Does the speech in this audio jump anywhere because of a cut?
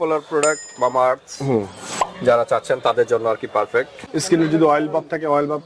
yes; 1 cut; at 4.0 s

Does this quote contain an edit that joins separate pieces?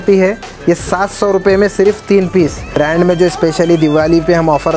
yes; 1 cut; at 2.7 s

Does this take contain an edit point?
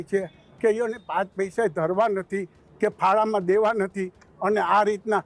no; 0 cuts

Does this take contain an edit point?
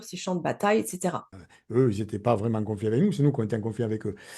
yes; 1 cut; at 1.3 s

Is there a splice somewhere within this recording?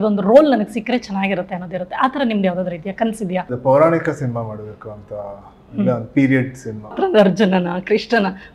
yes; 2 cuts; at 3.5 s, 7.0 s

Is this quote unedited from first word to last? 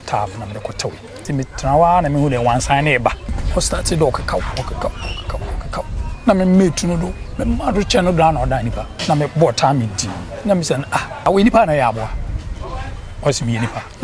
no; 4 cuts; at 1.2 s, 3.3 s, 8.9 s, 11.3 s

